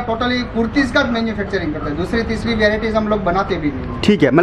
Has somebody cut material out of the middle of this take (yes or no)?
no